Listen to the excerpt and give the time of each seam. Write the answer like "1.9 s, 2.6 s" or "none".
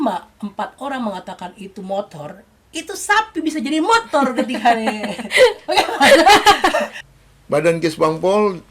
7.0 s